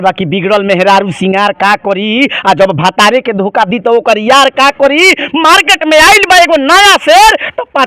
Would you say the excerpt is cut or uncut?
uncut